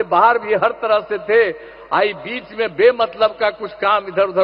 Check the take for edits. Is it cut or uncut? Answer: uncut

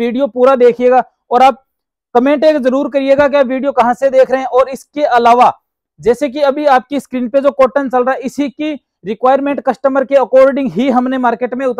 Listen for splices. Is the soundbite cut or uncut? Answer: uncut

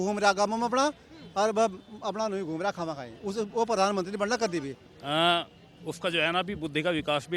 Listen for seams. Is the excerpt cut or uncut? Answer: cut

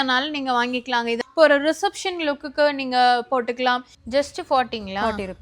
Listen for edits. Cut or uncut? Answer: cut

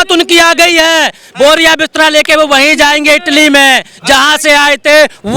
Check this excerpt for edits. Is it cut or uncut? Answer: uncut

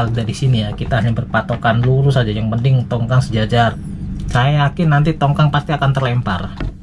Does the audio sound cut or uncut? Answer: cut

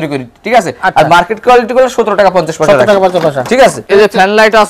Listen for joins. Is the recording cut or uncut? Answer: cut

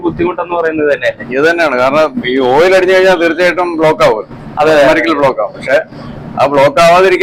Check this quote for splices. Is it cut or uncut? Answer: uncut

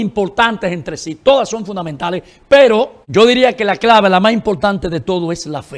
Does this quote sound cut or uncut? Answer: cut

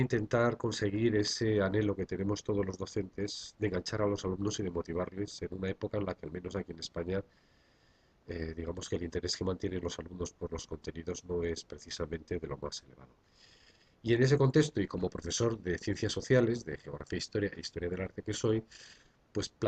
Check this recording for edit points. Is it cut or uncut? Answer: uncut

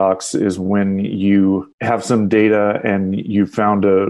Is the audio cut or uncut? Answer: cut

